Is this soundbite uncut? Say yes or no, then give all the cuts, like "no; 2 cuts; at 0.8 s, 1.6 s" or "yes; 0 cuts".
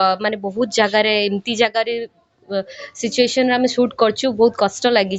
yes; 0 cuts